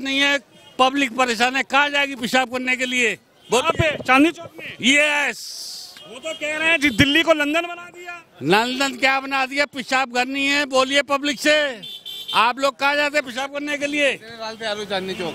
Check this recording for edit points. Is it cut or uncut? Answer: uncut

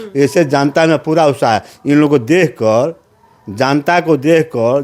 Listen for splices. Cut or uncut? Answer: uncut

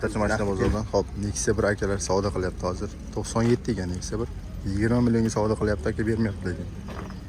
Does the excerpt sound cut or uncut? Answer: uncut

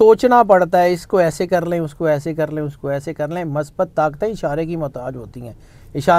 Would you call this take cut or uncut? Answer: uncut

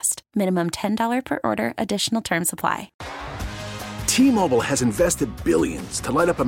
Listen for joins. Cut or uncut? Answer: cut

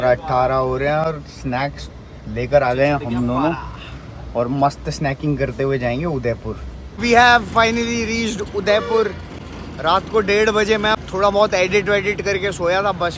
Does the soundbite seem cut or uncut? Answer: uncut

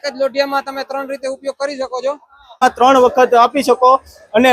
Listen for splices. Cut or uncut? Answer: cut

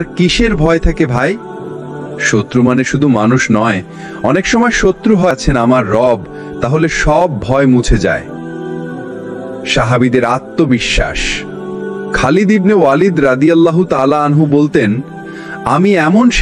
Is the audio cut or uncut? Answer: cut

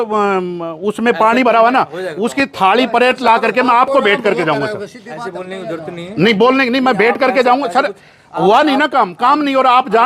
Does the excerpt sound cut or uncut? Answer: uncut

